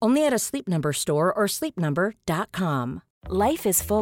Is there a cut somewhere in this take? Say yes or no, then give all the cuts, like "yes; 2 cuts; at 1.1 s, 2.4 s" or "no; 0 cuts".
yes; 1 cut; at 3.1 s